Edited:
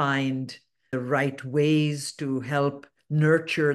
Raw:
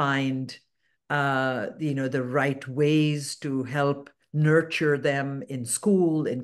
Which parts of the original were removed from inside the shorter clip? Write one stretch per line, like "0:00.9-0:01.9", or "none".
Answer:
0:00.9-0:02.1